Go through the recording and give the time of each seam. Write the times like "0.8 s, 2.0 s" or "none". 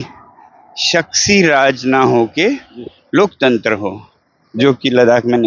none

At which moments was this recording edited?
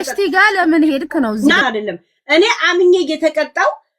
1.6 s

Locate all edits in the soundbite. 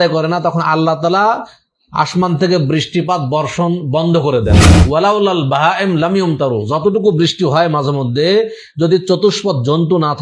4.8 s

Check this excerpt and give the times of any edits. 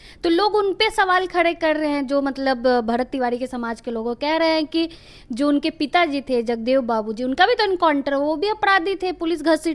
none

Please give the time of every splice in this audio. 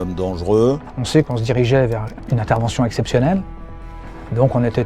1.2 s, 2.1 s

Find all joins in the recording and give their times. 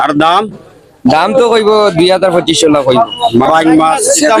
3.5 s

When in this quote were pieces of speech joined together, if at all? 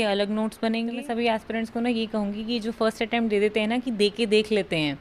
0.9 s

